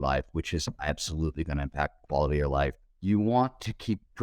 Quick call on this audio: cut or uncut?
cut